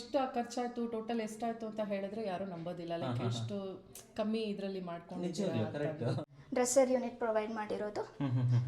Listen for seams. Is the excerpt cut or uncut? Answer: cut